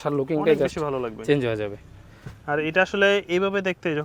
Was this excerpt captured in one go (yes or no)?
yes